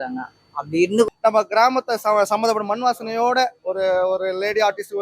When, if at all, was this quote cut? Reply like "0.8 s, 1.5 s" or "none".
1.1 s